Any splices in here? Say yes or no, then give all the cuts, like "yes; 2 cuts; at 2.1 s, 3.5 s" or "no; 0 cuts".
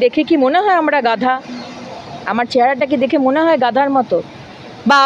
no; 0 cuts